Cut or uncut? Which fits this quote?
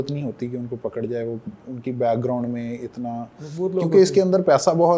uncut